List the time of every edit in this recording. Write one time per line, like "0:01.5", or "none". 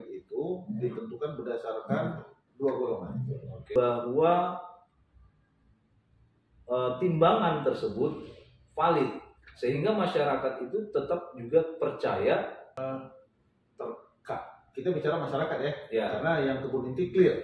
0:03.7
0:12.8